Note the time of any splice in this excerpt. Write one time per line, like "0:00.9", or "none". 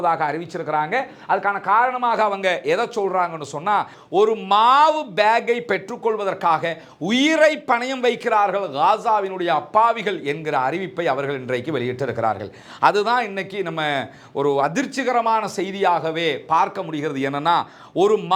0:03.9